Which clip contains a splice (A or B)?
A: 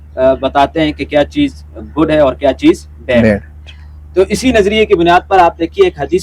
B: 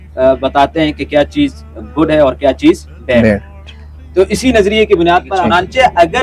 B